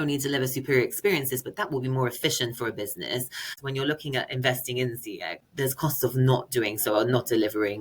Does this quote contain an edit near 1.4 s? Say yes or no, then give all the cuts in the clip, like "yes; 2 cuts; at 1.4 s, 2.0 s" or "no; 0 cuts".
no; 2 cuts; at 3.6 s, 5.5 s